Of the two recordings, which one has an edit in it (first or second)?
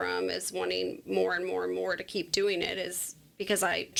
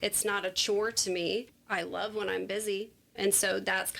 second